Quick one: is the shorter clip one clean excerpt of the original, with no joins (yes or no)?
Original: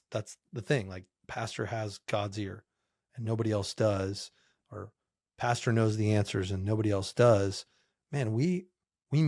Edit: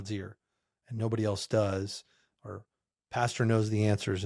yes